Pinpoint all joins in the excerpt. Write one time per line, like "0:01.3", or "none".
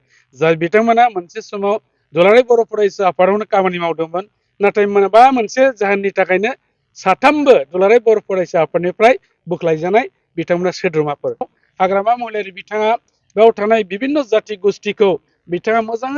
0:11.5